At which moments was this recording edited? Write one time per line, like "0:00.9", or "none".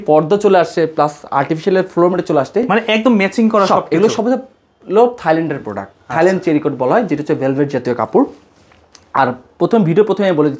none